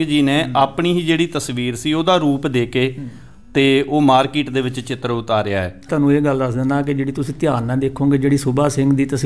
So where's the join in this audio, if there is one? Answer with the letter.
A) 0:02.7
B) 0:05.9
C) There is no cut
B